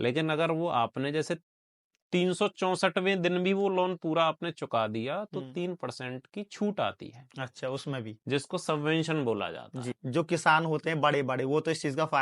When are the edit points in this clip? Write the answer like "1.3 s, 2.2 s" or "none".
10.0 s